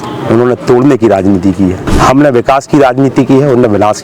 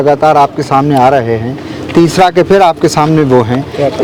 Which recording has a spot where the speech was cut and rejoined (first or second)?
first